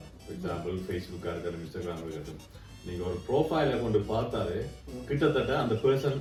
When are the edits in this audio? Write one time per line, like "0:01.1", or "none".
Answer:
none